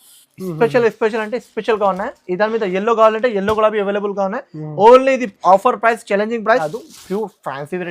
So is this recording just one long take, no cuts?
no; 1 cut; at 6.6 s

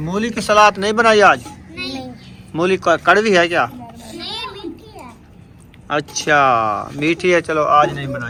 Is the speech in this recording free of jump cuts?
yes; 0 cuts

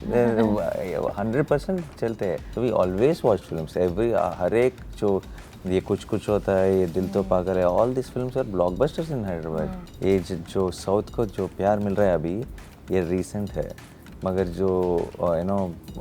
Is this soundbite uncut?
no; 2 cuts; at 2.5 s, 9.8 s

